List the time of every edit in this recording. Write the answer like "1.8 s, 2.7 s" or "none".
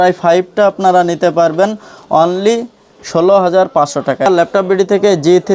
4.3 s